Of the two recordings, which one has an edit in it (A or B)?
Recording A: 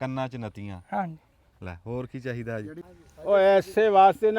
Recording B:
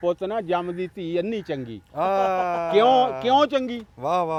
A